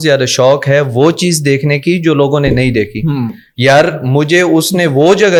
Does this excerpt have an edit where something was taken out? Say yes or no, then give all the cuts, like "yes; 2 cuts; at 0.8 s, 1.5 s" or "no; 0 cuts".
no; 0 cuts